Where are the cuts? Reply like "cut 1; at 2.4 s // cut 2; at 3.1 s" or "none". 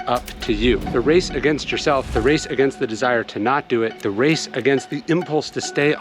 cut 1; at 2.1 s // cut 2; at 4.0 s